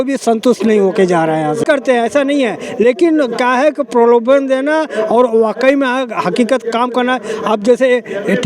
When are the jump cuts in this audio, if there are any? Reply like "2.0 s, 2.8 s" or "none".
1.6 s

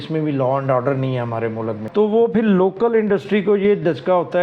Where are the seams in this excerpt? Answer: 1.8 s

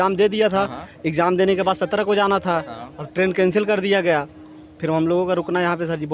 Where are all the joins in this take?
none

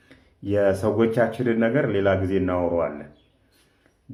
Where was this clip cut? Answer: none

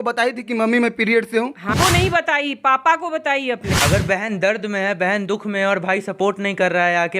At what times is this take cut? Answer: 1.7 s, 3.6 s

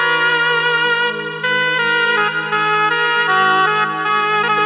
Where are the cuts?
none

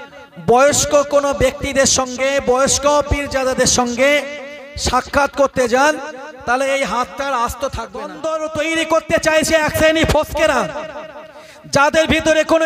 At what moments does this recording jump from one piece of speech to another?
8.2 s

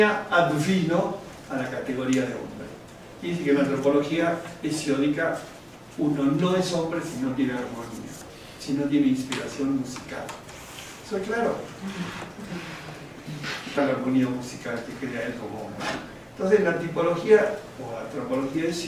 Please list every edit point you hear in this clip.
none

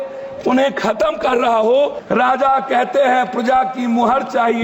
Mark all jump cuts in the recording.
2.0 s

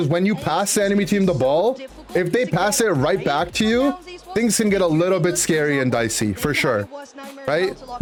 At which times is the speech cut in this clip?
none

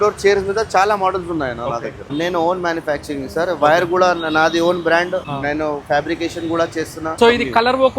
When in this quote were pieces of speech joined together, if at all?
2.1 s, 5.3 s, 7.2 s

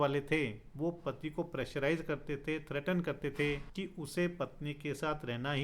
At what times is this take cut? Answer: 3.7 s

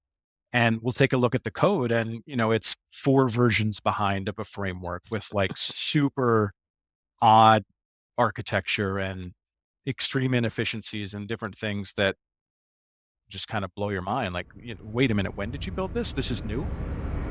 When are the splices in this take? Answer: none

